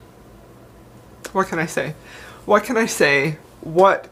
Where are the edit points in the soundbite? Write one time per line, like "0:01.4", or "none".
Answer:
none